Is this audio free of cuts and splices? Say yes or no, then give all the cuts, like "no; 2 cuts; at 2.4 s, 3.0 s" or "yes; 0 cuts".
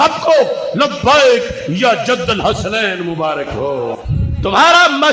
no; 1 cut; at 4.1 s